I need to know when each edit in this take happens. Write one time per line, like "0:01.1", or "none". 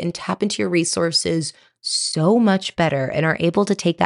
none